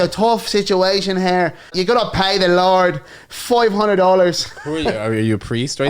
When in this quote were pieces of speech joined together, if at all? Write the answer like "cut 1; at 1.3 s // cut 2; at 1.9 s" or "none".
cut 1; at 1.7 s